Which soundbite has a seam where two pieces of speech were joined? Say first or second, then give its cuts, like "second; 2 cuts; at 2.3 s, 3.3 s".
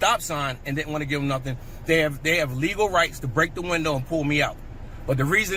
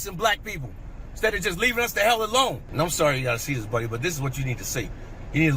second; 1 cut; at 2.6 s